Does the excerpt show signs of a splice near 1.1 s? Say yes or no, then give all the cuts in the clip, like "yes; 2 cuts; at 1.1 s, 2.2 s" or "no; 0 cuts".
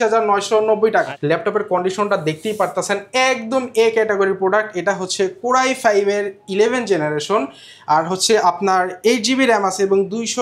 yes; 1 cut; at 1.1 s